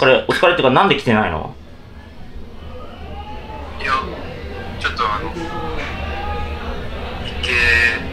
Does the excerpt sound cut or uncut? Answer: uncut